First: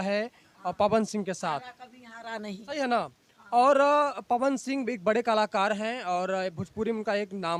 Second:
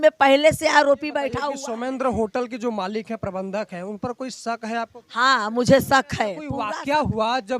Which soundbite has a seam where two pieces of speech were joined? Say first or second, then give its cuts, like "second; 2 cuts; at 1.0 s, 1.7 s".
second; 2 cuts; at 1.3 s, 6.5 s